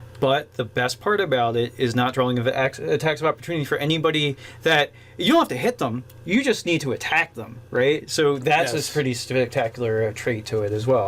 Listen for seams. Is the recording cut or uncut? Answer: cut